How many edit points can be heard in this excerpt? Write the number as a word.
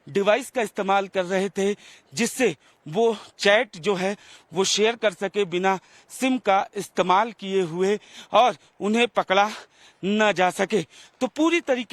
zero